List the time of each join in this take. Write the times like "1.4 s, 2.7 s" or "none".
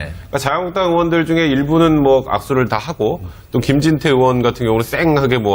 2.5 s